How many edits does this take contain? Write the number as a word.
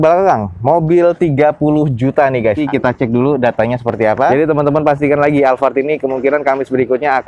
two